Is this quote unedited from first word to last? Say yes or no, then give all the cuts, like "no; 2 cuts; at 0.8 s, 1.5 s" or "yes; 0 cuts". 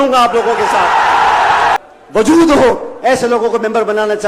no; 1 cut; at 1.8 s